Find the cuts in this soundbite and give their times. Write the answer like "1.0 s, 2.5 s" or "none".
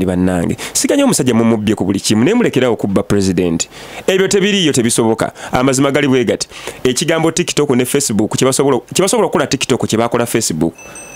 none